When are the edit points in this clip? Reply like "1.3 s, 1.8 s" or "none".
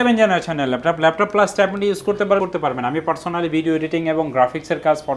2.4 s